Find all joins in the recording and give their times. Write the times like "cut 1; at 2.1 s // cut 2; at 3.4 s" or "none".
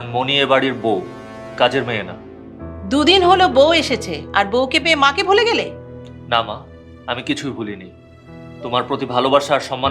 none